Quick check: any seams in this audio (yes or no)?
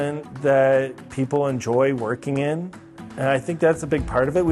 no